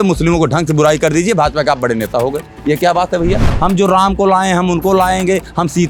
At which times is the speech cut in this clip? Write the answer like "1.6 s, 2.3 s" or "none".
3.5 s